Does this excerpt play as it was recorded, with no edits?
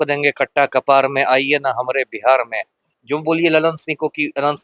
no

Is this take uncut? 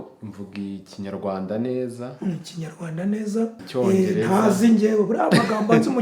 no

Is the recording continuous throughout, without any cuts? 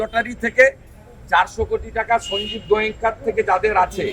yes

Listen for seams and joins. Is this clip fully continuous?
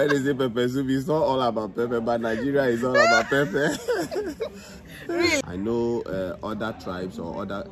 no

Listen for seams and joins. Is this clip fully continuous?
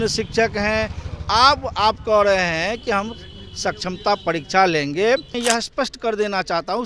no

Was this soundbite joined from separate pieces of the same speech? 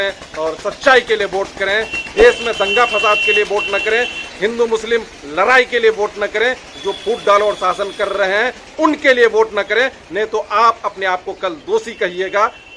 no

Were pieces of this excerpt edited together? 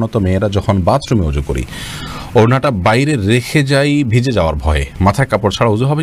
no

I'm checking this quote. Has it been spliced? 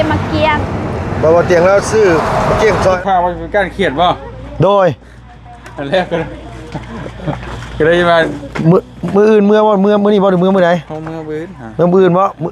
yes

